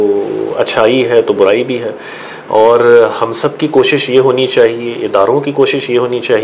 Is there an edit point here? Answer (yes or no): no